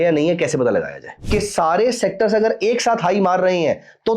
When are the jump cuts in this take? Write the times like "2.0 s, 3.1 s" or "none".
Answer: 1.1 s